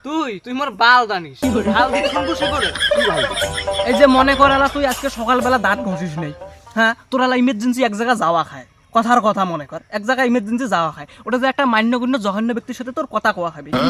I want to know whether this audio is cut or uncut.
uncut